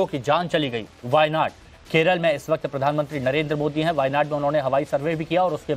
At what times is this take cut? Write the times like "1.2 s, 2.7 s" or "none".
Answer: none